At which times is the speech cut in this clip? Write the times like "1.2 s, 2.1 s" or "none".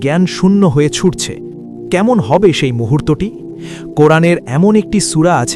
none